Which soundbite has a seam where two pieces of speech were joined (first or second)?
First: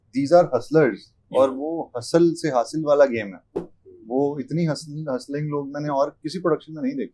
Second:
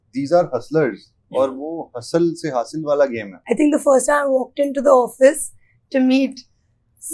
second